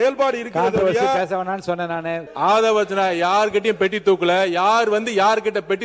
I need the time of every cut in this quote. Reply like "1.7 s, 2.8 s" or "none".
2.2 s